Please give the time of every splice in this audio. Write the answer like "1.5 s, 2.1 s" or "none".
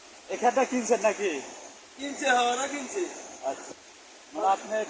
3.6 s

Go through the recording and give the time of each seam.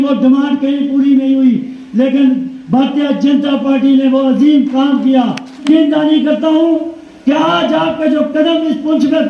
5.6 s

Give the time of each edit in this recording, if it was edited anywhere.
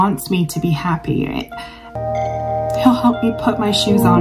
1.9 s

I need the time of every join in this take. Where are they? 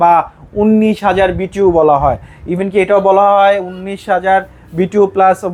none

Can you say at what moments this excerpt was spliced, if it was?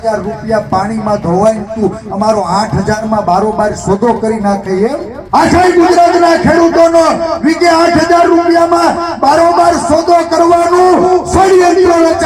5.1 s

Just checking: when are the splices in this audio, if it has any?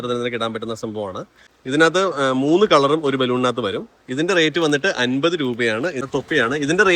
1.5 s, 6.0 s

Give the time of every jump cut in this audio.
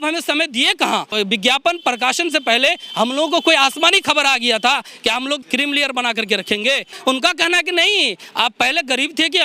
1.1 s, 5.4 s, 6.9 s

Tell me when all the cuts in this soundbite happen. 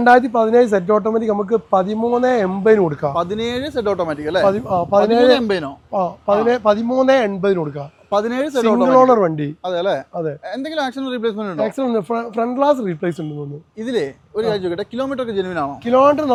none

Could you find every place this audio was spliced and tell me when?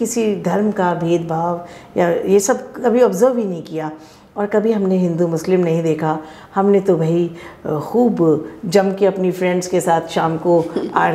none

